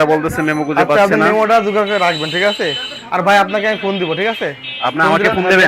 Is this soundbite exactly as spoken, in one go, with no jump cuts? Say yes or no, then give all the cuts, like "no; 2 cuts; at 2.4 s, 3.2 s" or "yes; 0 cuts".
yes; 0 cuts